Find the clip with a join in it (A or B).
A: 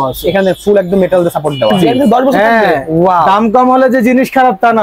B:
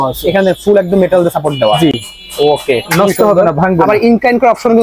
A